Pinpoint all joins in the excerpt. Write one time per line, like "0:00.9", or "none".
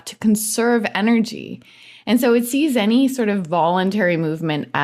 none